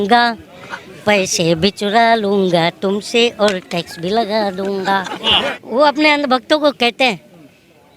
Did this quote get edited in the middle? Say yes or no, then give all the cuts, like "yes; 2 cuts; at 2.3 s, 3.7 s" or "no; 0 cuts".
yes; 1 cut; at 5.2 s